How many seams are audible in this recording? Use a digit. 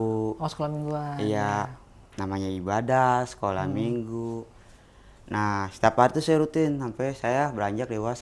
0